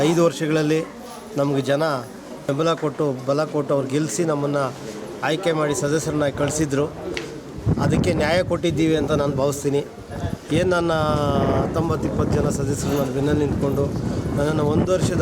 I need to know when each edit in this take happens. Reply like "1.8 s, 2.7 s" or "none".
2.4 s